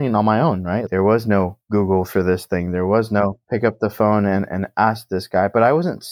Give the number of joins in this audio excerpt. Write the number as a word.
two